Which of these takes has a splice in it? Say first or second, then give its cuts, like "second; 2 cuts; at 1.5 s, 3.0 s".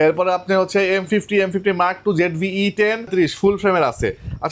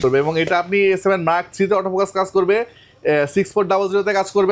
first; 1 cut; at 3.1 s